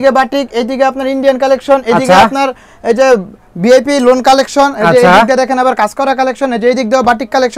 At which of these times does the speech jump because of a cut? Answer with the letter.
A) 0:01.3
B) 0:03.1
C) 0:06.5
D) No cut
D